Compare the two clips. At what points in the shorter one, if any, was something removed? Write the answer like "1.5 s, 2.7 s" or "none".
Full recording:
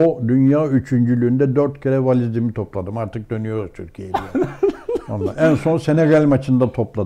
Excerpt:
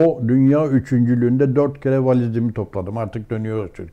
none